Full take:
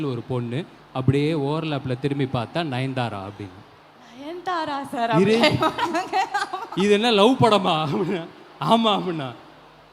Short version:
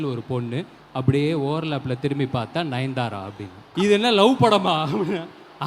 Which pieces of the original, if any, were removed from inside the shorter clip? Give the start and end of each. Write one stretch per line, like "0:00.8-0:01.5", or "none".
0:03.6-0:06.6